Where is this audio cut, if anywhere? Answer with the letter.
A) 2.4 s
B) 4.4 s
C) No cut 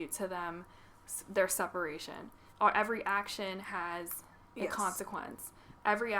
A